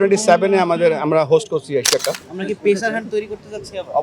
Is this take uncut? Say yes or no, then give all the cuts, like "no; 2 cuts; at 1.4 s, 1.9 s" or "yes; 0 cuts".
no; 1 cut; at 2.2 s